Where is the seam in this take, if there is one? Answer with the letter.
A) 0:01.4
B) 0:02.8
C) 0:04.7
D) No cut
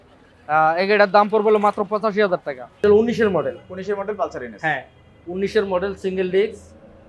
B